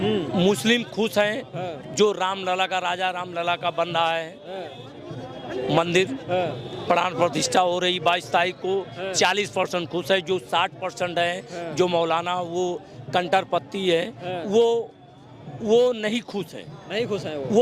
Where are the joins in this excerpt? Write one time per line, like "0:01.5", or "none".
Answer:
none